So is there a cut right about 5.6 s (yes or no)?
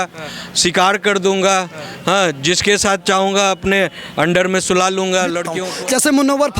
yes